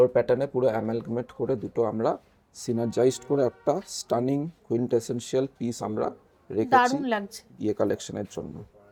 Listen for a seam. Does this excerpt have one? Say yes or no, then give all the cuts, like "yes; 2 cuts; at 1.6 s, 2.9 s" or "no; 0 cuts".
no; 0 cuts